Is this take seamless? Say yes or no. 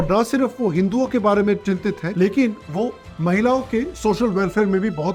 yes